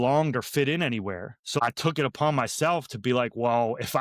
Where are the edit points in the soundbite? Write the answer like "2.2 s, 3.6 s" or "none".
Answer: 1.6 s